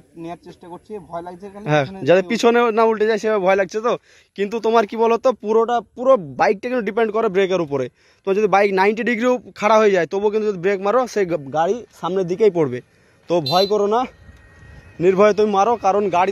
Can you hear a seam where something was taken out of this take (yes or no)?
no